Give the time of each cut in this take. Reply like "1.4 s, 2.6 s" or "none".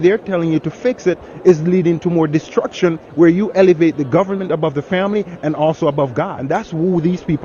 6.4 s